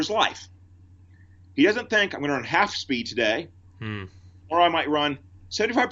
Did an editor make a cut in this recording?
no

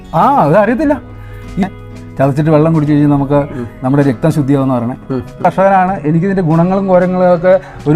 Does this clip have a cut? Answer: yes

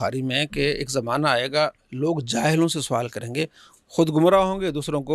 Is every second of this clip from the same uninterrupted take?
yes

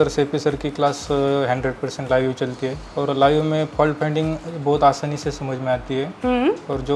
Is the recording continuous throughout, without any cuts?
no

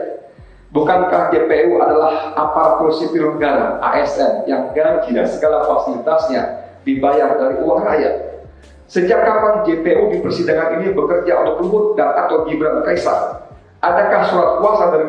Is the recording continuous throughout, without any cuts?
yes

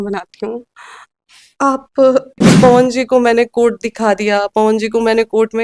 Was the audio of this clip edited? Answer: yes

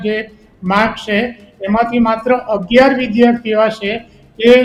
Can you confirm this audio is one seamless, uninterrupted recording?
yes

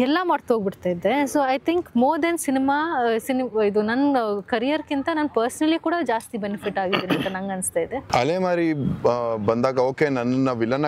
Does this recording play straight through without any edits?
no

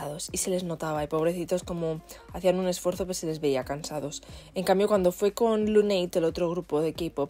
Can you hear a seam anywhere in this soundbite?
no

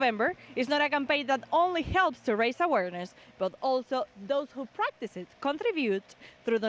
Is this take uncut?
yes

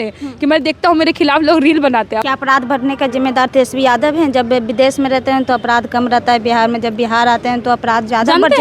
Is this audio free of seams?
no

